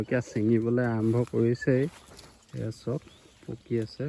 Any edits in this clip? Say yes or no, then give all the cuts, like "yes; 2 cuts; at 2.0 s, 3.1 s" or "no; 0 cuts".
yes; 1 cut; at 2.2 s